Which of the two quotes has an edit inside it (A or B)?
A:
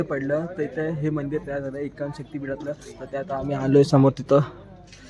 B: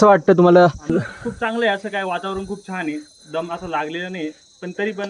B